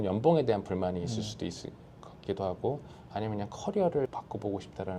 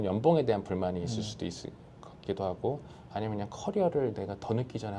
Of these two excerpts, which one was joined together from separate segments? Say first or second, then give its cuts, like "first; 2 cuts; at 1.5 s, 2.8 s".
first; 1 cut; at 4.1 s